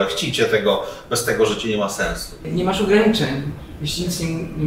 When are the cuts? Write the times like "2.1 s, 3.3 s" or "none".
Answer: 2.4 s